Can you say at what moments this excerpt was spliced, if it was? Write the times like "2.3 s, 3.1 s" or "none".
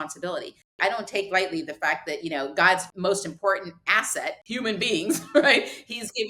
0.8 s, 2.9 s, 4.4 s